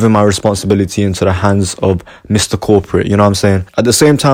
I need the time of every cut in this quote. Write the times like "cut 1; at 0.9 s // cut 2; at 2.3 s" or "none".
none